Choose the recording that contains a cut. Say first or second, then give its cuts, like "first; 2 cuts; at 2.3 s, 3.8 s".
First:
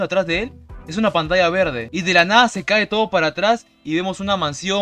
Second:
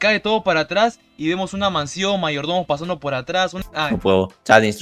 second; 1 cut; at 3.6 s